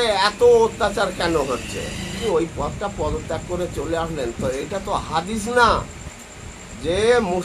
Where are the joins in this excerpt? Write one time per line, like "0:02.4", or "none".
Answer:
0:02.2